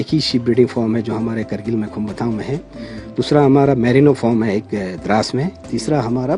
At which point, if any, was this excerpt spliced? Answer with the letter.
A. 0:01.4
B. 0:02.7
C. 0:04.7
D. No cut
D